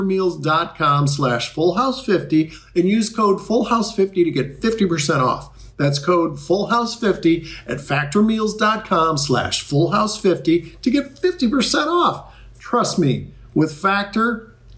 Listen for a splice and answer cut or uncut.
uncut